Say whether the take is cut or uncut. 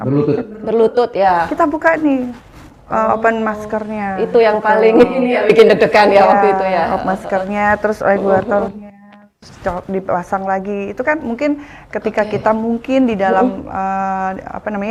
uncut